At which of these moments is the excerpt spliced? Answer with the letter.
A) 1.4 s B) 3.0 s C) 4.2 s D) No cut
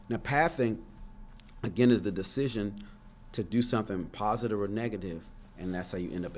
D